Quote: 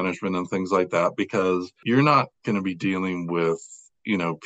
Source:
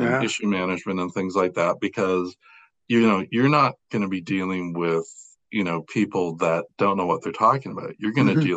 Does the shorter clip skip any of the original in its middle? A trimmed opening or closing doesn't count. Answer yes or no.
yes